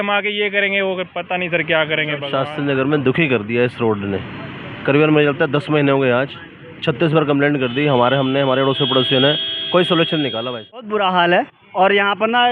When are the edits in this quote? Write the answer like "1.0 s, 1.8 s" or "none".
2.2 s, 10.9 s